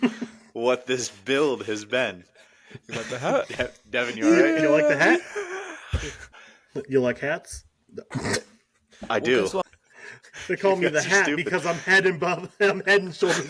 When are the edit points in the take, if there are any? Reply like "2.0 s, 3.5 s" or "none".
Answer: 6.3 s, 9.6 s